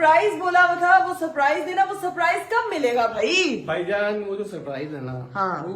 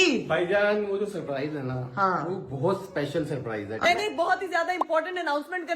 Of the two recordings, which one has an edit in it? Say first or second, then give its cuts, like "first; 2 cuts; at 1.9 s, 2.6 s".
second; 1 cut; at 3.8 s